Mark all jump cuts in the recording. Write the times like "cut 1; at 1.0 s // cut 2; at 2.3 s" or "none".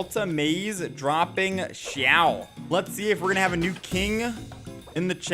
cut 1; at 2.5 s

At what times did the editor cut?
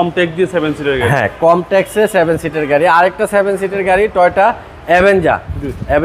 none

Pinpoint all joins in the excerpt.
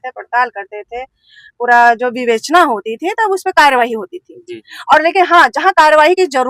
none

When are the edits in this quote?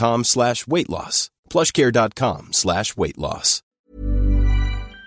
cut 1; at 3.7 s

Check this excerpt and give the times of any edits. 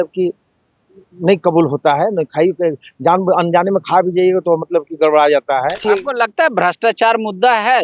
cut 1; at 5.8 s

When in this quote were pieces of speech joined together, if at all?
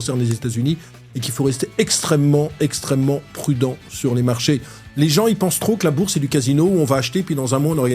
cut 1; at 4.8 s

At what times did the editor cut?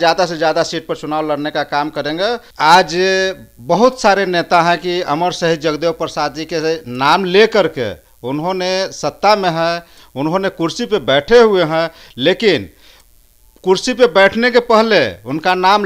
cut 1; at 2.5 s

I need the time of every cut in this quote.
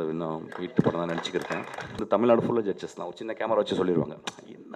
cut 1; at 2.0 s

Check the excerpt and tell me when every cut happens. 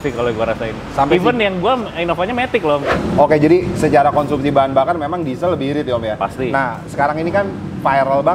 none

